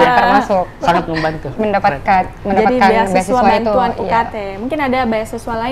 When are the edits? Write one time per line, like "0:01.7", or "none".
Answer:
none